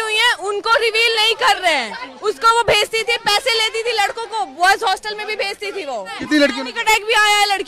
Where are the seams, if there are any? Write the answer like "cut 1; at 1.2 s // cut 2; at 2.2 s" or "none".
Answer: cut 1; at 2.1 s // cut 2; at 6.2 s